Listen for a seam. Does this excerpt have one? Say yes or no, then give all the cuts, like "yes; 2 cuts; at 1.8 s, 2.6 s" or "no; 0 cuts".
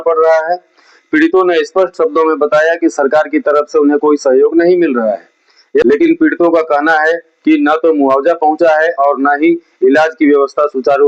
yes; 1 cut; at 5.8 s